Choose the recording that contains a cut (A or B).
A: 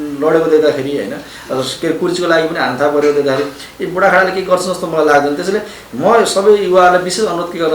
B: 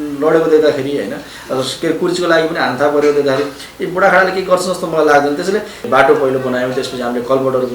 B